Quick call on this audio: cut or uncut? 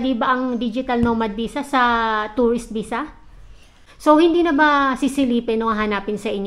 cut